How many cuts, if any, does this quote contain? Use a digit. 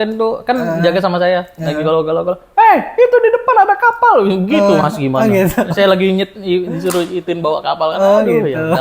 0